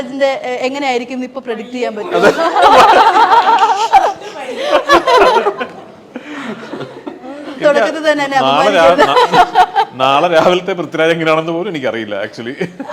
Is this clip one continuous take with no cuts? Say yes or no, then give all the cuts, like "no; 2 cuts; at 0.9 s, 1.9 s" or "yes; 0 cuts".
yes; 0 cuts